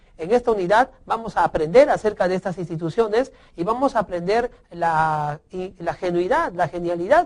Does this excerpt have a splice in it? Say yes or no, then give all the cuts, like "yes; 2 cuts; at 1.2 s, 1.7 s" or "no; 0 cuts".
no; 0 cuts